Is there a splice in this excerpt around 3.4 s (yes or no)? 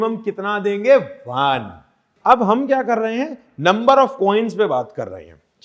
no